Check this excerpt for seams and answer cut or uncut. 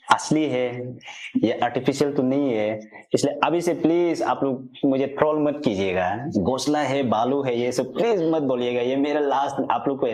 uncut